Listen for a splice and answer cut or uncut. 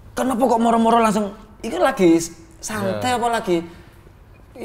uncut